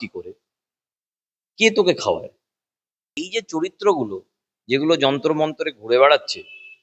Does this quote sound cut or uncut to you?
cut